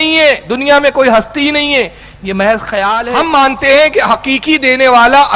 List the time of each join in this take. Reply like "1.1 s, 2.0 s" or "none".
2.9 s